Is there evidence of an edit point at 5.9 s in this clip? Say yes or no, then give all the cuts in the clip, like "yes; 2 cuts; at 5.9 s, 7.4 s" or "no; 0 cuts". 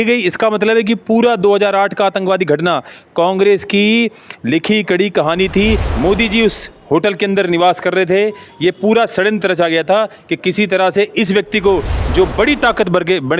yes; 1 cut; at 5.9 s